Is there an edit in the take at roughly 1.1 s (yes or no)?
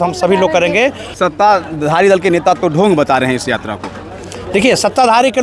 yes